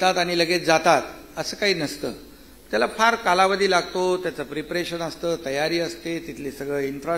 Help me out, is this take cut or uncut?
uncut